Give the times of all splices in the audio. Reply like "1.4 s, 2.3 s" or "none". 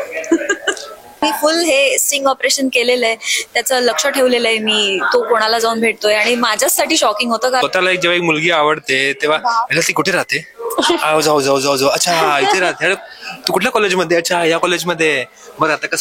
1.2 s, 7.6 s